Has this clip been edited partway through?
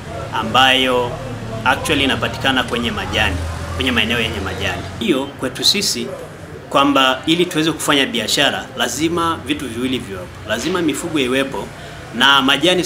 yes; 1 cut; at 5.0 s

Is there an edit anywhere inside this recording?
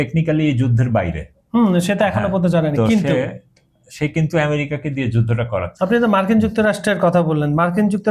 yes; 1 cut; at 5.7 s

